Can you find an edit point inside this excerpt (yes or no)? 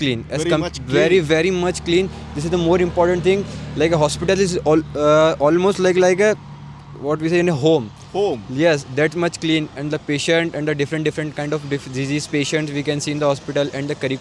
no